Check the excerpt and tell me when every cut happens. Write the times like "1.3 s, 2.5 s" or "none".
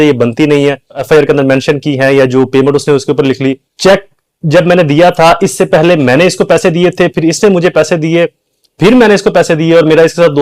1.0 s, 3.7 s